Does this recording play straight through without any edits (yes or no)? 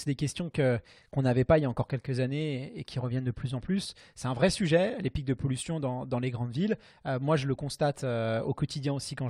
yes